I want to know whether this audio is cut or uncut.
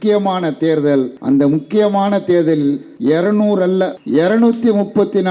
cut